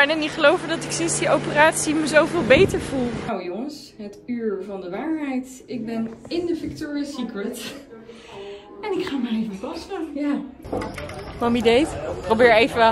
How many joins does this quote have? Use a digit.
2